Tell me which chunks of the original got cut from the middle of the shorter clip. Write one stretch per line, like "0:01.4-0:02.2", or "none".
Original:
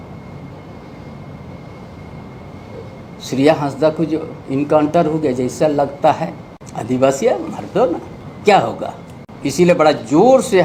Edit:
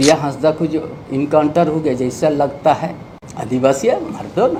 none